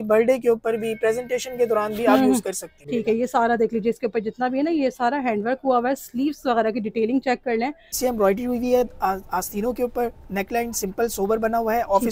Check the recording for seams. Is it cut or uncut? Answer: cut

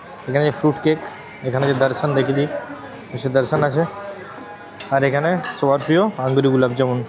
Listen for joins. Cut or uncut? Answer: uncut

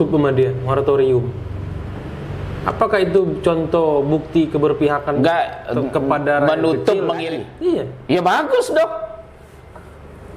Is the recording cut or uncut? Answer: cut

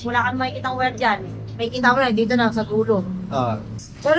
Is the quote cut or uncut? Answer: uncut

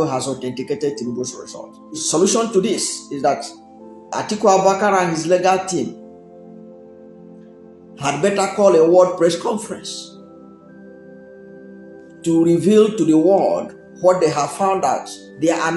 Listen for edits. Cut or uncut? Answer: cut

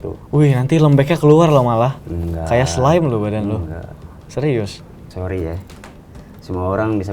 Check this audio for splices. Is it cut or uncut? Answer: cut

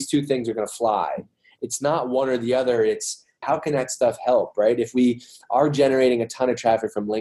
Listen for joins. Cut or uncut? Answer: cut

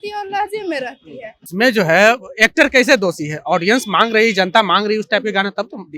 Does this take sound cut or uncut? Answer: cut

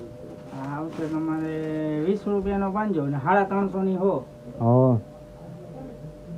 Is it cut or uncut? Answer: uncut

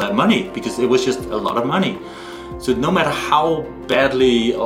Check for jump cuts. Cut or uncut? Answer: uncut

